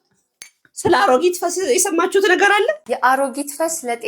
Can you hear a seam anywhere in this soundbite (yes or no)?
yes